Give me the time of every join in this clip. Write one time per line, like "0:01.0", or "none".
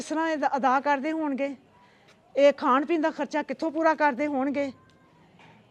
none